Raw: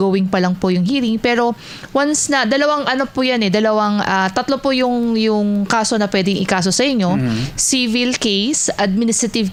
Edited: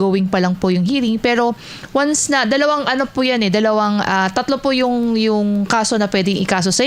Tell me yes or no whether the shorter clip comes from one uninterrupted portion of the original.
yes